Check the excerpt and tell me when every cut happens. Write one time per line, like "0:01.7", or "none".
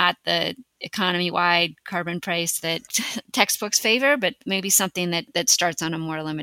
0:05.3